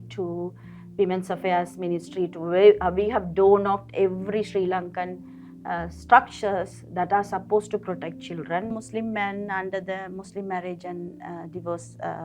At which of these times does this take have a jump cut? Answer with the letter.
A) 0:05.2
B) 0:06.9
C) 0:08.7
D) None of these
C